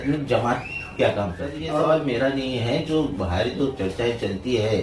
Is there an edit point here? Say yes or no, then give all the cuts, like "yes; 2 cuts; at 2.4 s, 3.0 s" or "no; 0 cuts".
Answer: yes; 1 cut; at 1.6 s